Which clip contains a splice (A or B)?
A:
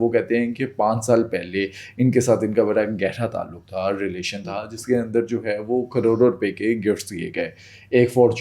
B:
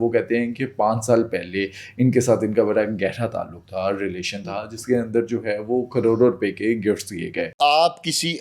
B